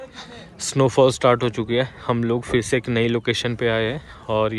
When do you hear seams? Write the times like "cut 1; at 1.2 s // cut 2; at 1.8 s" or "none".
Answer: none